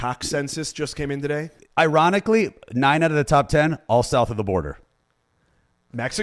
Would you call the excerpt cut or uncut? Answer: cut